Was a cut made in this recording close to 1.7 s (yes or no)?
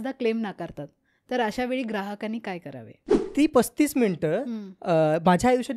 no